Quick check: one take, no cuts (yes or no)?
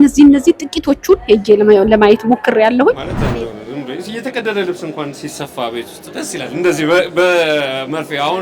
no